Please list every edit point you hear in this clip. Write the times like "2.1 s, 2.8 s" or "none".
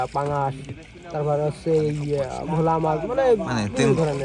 none